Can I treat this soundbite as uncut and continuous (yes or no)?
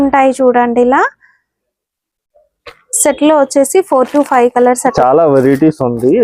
no